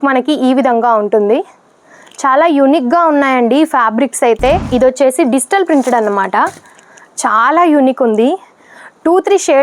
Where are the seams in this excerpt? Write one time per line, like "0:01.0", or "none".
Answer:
0:04.6